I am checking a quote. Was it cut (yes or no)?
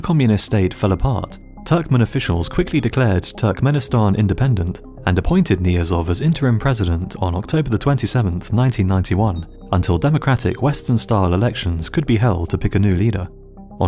yes